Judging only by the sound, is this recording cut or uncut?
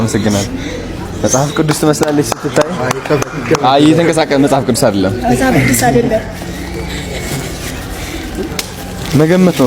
uncut